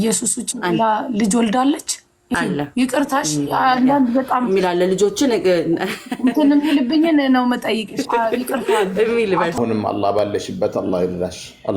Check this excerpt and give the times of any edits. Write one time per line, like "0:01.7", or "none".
0:02.3
0:09.6